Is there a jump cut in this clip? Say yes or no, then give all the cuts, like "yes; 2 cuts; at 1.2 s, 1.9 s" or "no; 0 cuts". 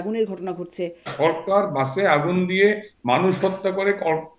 yes; 1 cut; at 1.1 s